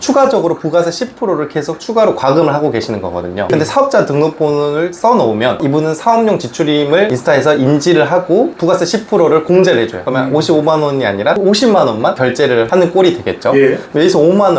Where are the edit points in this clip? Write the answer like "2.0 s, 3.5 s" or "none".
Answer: none